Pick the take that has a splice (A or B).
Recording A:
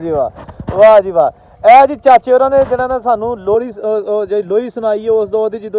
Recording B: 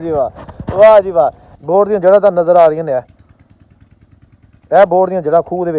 B